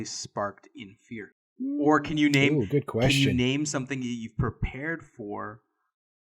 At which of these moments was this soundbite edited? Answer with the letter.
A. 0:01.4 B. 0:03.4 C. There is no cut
A